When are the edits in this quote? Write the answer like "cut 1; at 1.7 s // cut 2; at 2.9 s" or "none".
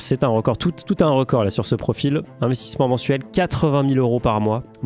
none